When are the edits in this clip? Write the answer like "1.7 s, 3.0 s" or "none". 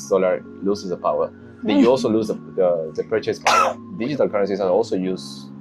3.9 s